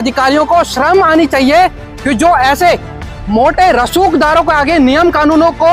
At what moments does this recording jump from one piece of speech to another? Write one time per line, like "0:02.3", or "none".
none